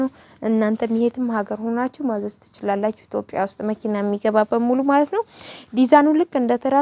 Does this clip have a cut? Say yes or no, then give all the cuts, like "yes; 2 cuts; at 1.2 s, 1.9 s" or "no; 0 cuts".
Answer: no; 0 cuts